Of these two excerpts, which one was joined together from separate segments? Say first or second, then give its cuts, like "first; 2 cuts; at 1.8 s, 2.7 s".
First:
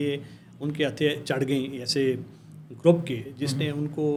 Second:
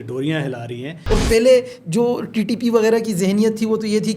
second; 1 cut; at 0.9 s